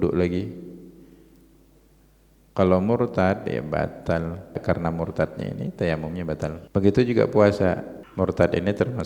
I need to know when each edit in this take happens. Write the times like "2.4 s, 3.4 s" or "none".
4.6 s, 6.6 s, 8.0 s